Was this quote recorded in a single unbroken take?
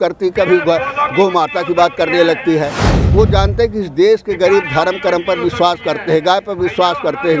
no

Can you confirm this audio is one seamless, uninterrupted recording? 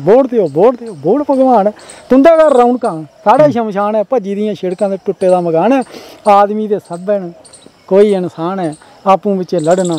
yes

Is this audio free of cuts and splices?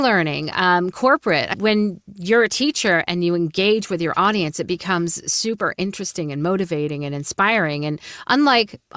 no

